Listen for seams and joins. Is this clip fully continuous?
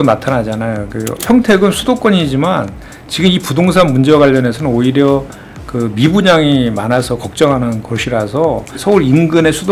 no; 2 cuts; at 1.2 s, 8.7 s

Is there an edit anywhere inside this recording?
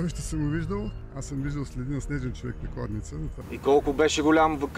yes; 2 cuts; at 1.1 s, 3.4 s

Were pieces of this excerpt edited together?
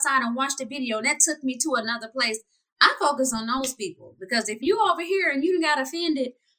yes; 1 cut; at 4.6 s

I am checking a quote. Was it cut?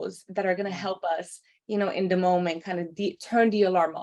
no; 0 cuts

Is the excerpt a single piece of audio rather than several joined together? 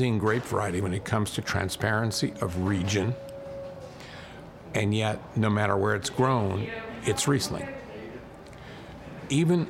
yes; 0 cuts

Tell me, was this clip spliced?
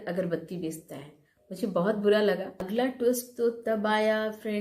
yes; 1 cut; at 2.6 s

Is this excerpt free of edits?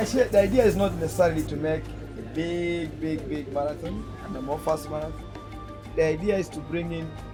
yes; 0 cuts

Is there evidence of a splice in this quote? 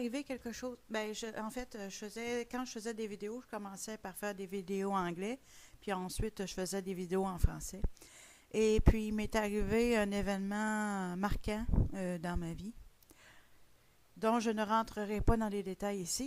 no; 0 cuts

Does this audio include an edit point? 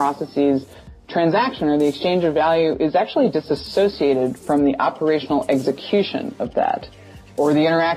no; 0 cuts

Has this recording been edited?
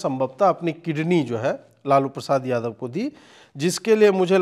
no; 0 cuts

